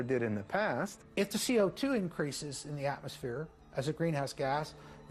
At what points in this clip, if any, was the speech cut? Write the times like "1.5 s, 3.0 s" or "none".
1.0 s